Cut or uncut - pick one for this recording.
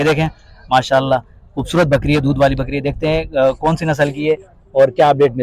uncut